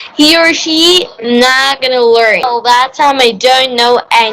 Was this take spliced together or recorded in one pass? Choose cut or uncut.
cut